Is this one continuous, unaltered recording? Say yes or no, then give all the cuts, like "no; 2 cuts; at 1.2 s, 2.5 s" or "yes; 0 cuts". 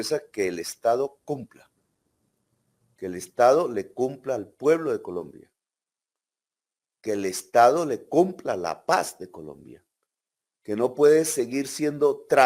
yes; 0 cuts